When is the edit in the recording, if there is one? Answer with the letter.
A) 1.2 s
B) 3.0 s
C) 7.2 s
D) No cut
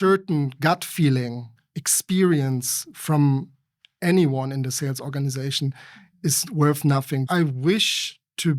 C